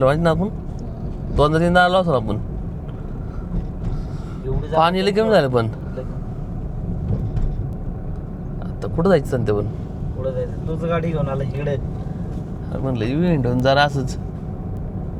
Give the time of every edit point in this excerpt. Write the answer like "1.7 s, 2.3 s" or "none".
none